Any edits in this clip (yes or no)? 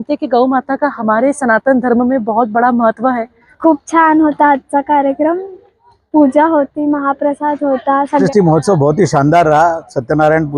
yes